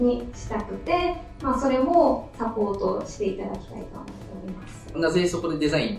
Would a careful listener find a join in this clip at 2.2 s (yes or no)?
no